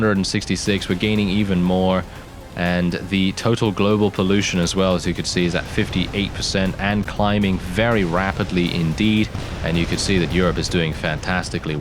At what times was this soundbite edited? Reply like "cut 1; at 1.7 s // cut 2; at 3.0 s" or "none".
cut 1; at 9.5 s